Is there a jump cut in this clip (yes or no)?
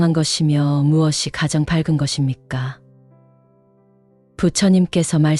yes